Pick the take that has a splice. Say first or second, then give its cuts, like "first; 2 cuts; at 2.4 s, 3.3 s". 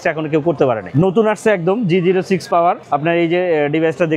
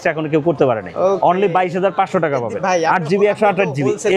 first; 2 cuts; at 0.9 s, 2.8 s